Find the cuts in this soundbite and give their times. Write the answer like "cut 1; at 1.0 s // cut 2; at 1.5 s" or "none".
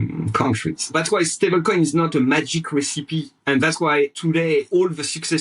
cut 1; at 0.9 s // cut 2; at 3.3 s // cut 3; at 4.6 s